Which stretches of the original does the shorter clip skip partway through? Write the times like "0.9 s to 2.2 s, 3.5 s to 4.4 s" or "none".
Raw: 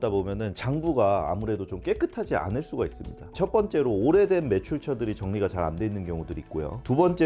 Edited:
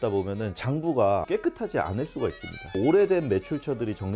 1.2 s to 1.8 s, 3.3 s to 4.0 s